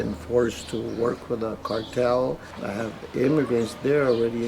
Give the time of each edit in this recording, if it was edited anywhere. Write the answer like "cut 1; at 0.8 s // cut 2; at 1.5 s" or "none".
cut 1; at 2.5 s